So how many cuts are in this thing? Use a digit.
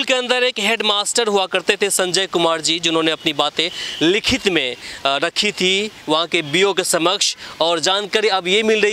0